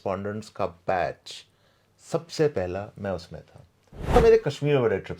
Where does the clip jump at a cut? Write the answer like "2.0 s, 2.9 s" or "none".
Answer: 4.2 s